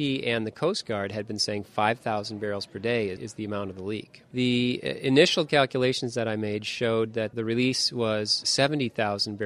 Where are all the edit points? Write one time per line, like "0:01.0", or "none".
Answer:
0:04.3
0:07.3
0:08.4